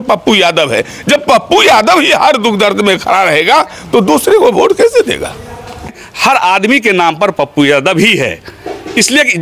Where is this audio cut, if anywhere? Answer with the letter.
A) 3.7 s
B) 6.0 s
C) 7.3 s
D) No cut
B